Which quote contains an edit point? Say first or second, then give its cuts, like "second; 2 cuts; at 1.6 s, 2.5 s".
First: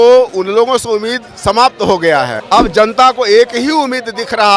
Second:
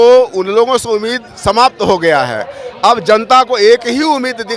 first; 1 cut; at 2.4 s